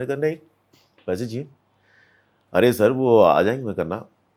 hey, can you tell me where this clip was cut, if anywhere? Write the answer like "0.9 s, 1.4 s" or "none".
none